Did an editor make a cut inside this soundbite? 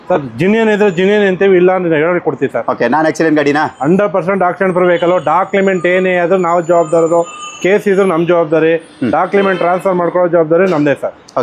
no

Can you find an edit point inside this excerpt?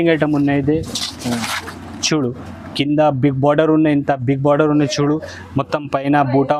no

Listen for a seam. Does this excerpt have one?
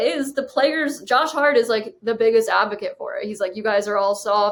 no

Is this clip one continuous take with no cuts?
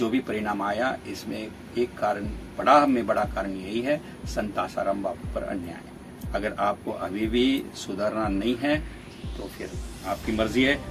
yes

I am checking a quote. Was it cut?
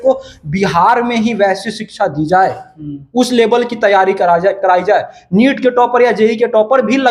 no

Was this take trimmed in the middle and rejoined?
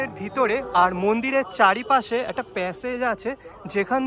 no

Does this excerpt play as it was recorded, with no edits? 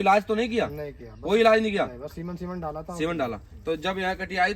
yes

